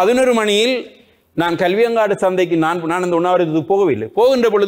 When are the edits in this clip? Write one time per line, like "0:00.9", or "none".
none